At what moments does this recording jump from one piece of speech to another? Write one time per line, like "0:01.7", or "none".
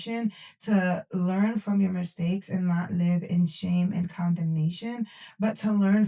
none